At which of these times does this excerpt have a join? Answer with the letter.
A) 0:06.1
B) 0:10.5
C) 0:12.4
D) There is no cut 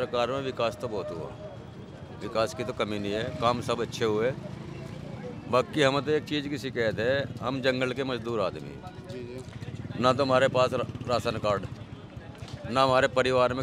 D